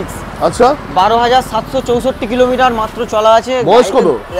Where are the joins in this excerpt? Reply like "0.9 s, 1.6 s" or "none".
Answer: none